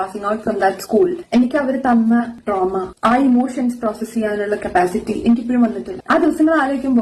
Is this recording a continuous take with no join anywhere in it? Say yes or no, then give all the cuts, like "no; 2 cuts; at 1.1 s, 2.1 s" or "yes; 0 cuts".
yes; 0 cuts